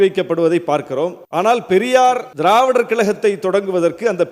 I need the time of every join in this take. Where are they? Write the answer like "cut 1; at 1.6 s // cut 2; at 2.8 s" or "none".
cut 1; at 1.2 s // cut 2; at 2.3 s